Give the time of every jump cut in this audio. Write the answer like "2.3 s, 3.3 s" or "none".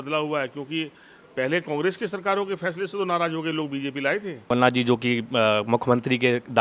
4.5 s